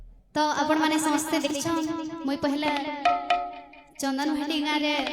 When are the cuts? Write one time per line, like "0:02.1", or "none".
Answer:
0:01.5